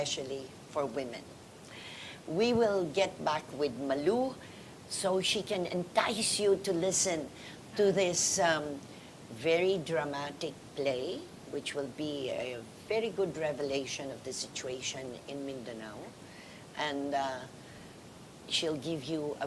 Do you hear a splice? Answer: no; 0 cuts

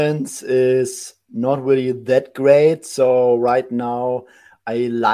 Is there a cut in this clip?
no; 0 cuts

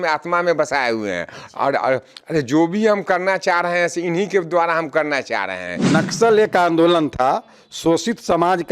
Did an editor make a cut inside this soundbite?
yes; 1 cut; at 5.9 s

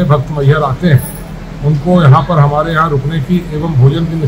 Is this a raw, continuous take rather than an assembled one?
yes; 0 cuts

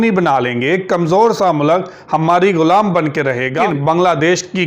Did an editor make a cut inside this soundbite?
yes; 1 cut; at 3.6 s

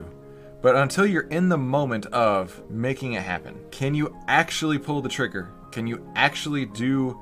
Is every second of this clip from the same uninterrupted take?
no; 3 cuts; at 2.6 s, 3.6 s, 5.6 s

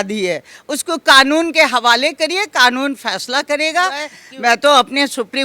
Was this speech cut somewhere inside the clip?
yes; 1 cut; at 4.2 s

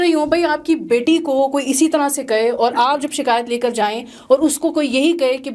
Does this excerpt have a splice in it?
no; 0 cuts

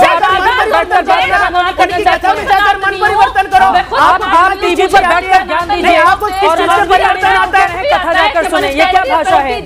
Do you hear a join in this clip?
no; 0 cuts

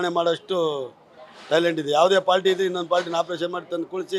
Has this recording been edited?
no; 0 cuts

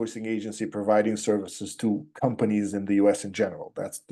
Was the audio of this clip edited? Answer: no; 0 cuts

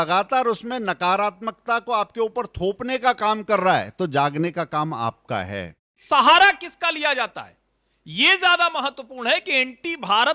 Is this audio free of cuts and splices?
no; 1 cut; at 6.0 s

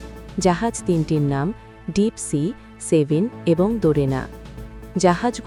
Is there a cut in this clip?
no; 0 cuts

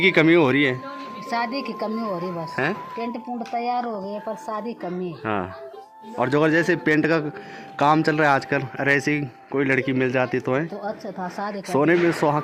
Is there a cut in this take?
no; 0 cuts

